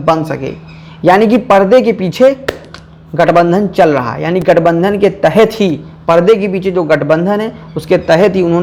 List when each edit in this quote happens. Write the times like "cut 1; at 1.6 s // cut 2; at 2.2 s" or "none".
none